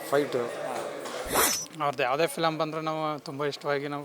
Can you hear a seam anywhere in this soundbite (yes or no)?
yes